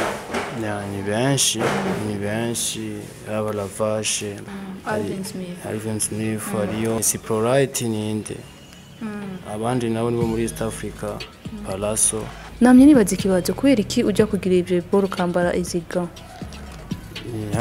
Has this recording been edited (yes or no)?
yes